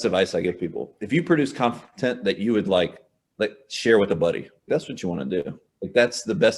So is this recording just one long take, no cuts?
yes; 0 cuts

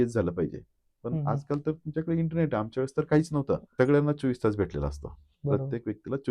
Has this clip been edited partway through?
yes; 1 cut; at 3.7 s

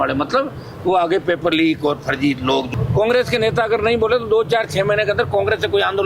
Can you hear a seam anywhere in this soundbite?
yes; 1 cut; at 2.7 s

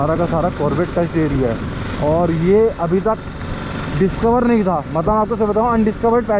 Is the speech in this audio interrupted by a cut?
no; 0 cuts

